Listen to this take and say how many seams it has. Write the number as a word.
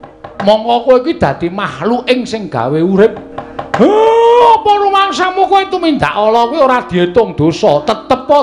one